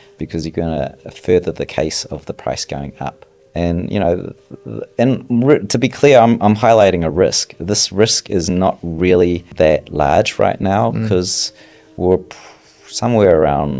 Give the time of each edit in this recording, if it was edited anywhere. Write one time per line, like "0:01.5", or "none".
0:09.4